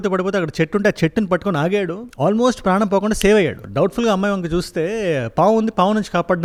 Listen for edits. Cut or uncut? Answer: uncut